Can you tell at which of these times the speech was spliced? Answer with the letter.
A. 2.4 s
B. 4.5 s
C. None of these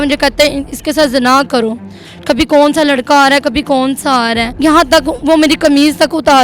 B